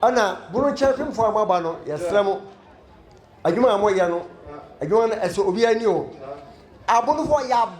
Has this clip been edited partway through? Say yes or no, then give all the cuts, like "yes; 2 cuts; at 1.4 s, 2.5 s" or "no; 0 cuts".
no; 0 cuts